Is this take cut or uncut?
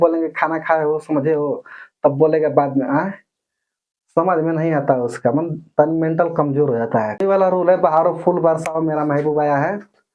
cut